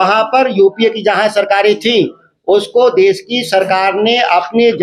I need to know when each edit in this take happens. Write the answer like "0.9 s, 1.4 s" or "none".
none